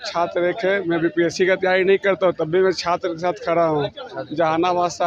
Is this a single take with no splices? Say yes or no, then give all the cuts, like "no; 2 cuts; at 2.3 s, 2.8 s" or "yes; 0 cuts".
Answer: yes; 0 cuts